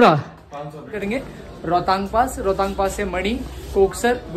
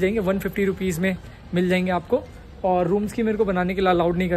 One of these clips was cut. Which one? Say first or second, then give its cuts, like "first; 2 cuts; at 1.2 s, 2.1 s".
first; 1 cut; at 1.0 s